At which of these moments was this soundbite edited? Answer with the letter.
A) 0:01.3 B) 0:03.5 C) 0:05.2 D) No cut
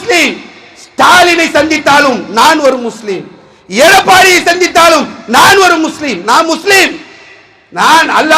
D